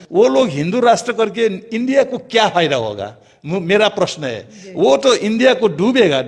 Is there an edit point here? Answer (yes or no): no